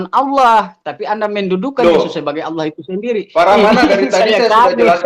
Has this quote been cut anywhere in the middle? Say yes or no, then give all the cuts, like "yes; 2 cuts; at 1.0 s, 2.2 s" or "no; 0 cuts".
no; 0 cuts